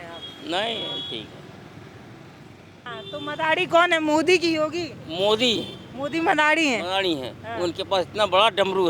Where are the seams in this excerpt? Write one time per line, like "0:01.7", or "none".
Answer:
0:02.9